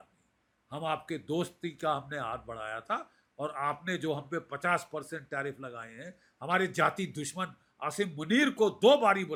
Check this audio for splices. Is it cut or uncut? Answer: uncut